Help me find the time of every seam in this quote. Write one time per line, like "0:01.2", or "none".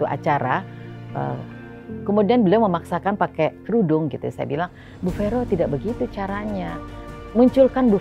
0:03.6

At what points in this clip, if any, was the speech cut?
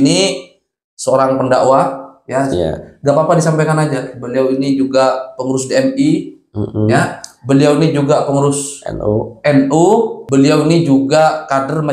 0:10.2

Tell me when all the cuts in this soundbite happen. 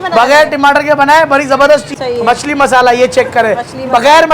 0:01.9

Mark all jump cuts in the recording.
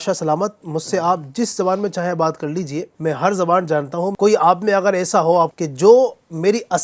0:02.9
0:04.1
0:05.5

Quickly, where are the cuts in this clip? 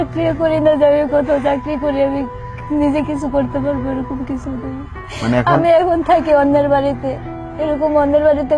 none

